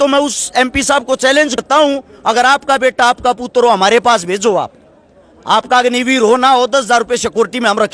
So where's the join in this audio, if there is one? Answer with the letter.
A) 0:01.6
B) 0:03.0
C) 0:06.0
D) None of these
A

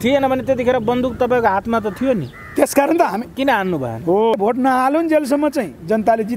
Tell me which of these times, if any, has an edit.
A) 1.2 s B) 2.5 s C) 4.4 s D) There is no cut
C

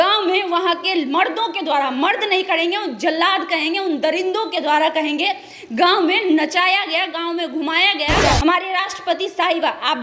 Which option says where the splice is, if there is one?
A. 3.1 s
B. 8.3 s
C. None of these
B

